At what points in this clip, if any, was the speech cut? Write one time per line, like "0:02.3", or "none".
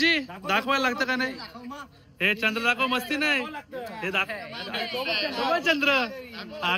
none